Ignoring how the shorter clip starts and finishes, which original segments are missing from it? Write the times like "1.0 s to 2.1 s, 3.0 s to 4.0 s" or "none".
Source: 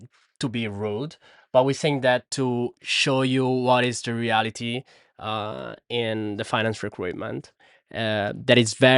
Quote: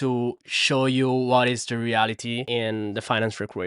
4.8 s to 5.9 s